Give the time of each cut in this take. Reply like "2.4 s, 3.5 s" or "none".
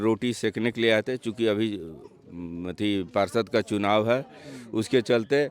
none